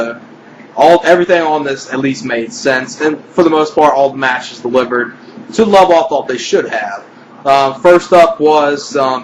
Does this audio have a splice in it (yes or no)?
yes